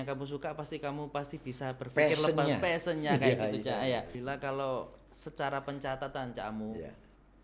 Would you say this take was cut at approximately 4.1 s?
yes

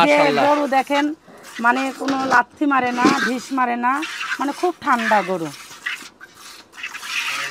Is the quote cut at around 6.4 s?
no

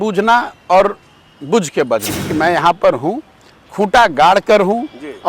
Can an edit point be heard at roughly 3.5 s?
no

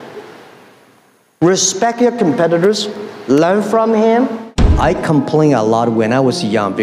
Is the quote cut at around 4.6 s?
yes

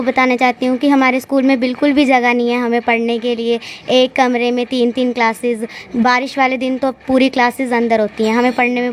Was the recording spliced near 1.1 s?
no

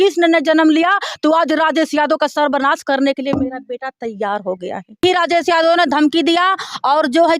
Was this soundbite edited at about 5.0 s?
yes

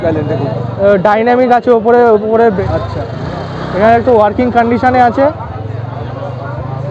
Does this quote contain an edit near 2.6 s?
yes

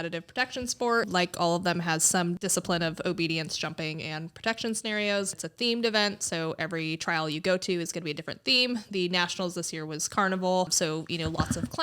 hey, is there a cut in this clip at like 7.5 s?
no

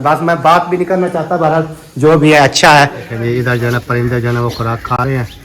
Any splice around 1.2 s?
no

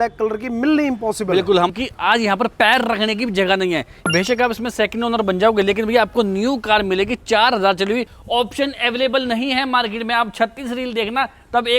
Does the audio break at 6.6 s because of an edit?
no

